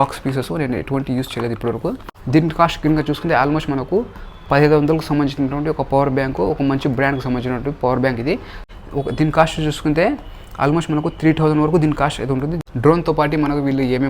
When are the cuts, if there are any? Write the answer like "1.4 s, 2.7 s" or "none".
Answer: 2.1 s, 8.6 s, 12.6 s